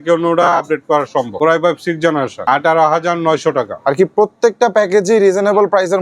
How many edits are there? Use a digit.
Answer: 2